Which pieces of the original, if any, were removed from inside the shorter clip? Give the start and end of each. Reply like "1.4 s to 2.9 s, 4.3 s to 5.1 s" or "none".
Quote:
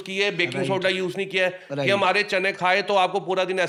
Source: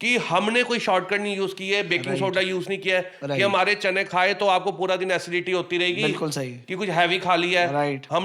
none

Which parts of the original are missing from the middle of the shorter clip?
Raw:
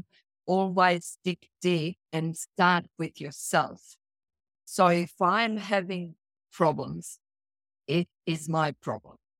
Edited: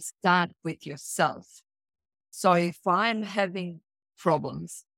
none

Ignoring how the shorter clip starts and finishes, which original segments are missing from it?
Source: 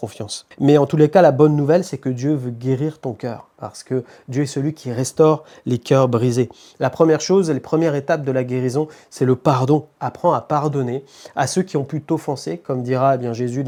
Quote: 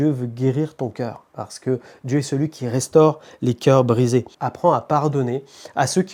6.6 s to 10.0 s

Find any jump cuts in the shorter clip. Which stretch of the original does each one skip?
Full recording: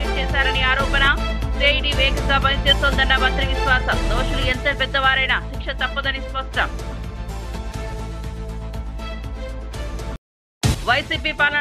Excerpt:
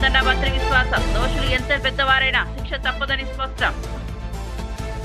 none

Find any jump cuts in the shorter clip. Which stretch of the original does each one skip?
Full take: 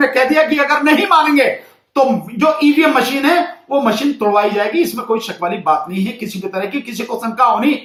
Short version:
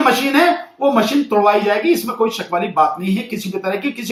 none

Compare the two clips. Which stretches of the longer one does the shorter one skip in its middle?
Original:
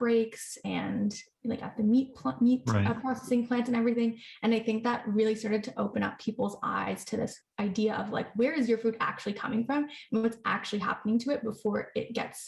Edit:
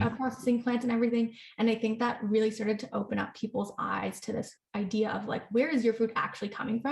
none

